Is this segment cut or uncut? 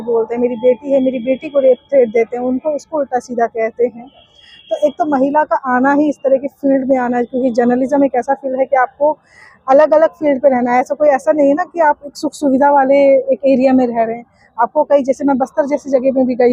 uncut